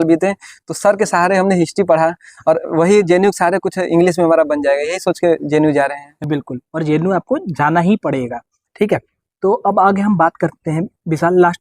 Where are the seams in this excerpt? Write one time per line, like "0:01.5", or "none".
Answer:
none